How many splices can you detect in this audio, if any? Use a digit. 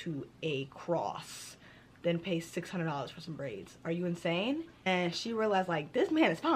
1